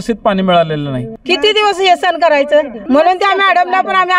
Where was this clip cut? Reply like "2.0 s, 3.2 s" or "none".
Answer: 1.1 s, 2.8 s